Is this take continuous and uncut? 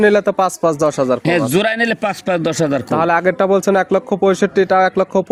yes; 0 cuts

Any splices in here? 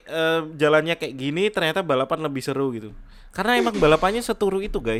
no; 0 cuts

